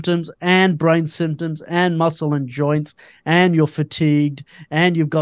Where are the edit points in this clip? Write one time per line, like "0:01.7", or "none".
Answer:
none